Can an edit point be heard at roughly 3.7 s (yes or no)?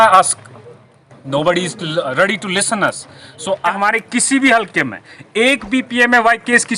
yes